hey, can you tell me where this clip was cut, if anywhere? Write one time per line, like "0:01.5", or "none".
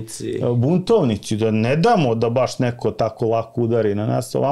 none